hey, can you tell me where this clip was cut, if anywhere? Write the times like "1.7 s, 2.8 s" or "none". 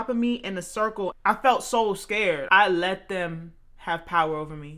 1.2 s, 2.4 s